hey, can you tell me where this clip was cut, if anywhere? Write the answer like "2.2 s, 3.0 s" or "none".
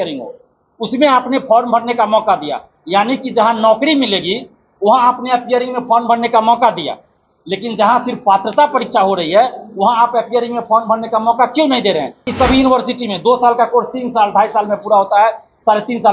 12.3 s